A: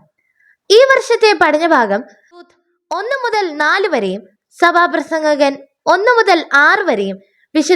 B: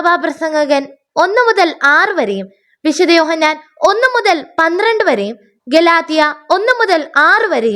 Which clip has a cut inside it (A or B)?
A